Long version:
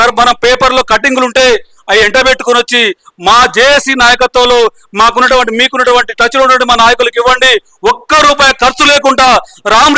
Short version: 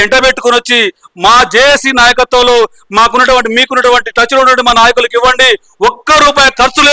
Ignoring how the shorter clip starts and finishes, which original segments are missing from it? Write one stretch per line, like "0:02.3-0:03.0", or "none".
none